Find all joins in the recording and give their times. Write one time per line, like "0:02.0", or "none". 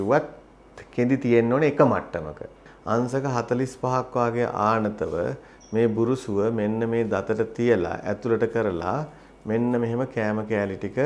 0:02.7